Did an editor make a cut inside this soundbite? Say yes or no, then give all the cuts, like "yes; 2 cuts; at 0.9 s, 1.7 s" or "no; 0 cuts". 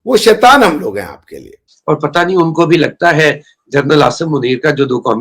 yes; 1 cut; at 1.7 s